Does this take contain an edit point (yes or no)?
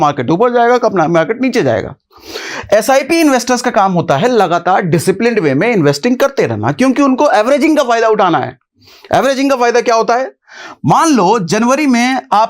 no